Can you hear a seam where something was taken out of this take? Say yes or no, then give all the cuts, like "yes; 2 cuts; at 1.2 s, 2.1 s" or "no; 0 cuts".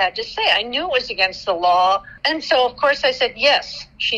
yes; 1 cut; at 2.1 s